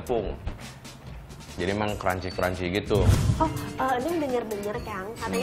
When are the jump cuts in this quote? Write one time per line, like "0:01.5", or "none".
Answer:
0:03.2